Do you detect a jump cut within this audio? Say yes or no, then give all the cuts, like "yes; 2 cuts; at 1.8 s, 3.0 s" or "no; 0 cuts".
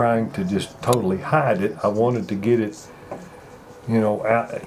no; 0 cuts